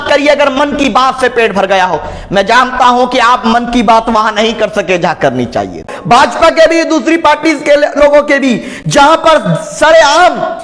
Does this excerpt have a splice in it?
yes; 1 cut; at 5.9 s

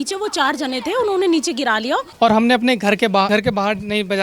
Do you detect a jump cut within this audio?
yes; 2 cuts; at 2.1 s, 3.3 s

